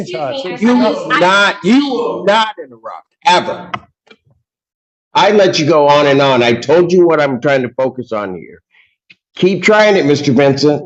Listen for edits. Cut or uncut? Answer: uncut